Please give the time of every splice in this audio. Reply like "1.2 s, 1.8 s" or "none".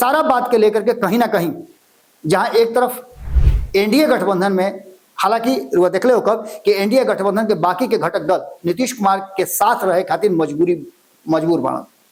none